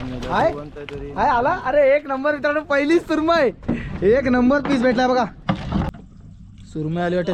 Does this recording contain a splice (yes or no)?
yes